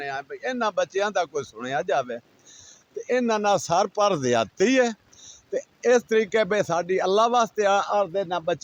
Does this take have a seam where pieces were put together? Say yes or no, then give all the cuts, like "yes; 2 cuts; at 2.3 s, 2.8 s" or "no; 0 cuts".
no; 0 cuts